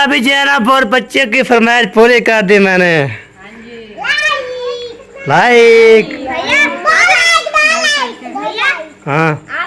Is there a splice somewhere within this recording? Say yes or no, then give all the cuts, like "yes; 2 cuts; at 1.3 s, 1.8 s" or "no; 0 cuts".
no; 0 cuts